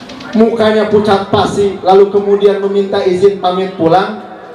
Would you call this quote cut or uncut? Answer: uncut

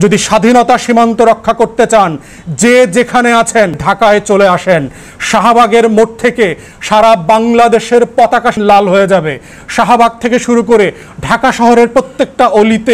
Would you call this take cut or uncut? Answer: cut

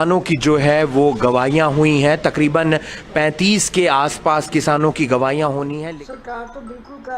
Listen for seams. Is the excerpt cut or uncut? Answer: cut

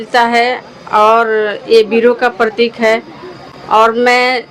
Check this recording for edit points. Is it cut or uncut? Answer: uncut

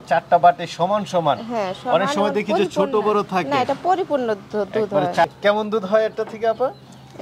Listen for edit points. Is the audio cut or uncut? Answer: cut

